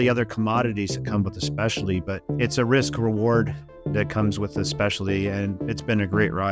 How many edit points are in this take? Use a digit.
2